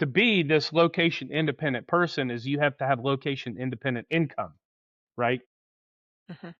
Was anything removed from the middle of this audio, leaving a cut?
no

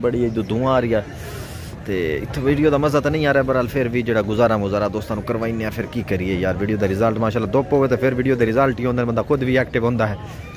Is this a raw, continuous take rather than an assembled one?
yes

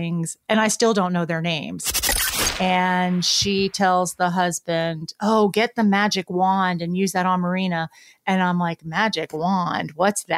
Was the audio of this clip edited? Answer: yes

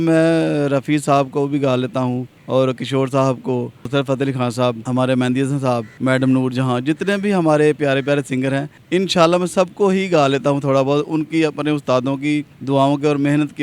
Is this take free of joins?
no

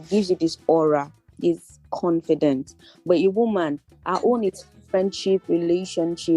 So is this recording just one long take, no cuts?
yes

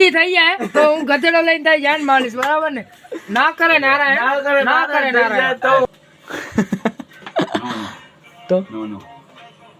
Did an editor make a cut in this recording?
yes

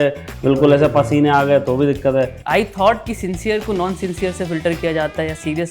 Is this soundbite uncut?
no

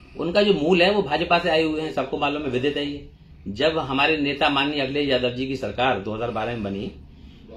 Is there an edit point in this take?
no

